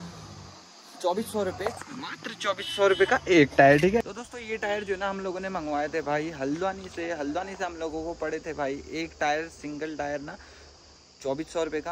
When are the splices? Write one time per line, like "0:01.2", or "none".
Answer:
none